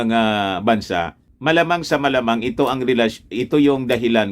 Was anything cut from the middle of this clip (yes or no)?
yes